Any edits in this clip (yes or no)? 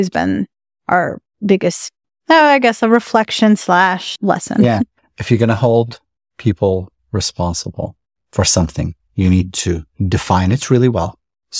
yes